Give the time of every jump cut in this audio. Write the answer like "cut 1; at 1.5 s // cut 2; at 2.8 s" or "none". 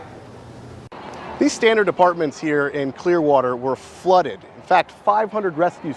cut 1; at 4.5 s